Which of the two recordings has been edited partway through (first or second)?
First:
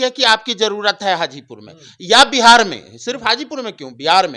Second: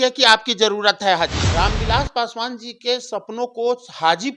second